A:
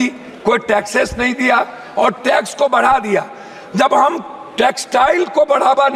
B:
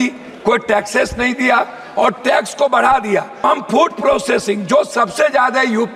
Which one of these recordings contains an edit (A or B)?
B